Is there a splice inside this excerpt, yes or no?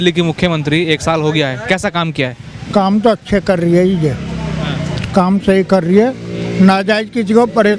no